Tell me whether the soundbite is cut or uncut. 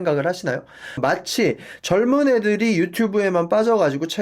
cut